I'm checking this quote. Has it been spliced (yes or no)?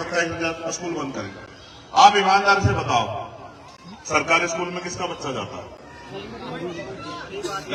no